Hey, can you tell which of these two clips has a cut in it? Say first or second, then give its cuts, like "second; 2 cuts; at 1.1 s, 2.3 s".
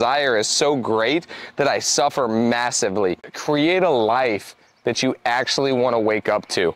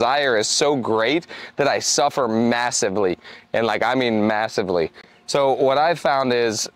first; 1 cut; at 3.3 s